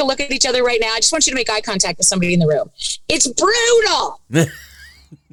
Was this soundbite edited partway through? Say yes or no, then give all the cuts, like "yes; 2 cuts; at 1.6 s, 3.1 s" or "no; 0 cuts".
no; 0 cuts